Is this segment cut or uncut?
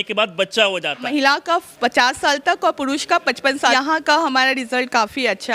cut